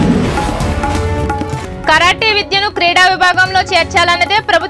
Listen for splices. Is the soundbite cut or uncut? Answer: cut